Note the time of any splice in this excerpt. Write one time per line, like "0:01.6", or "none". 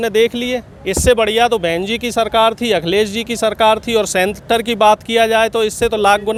none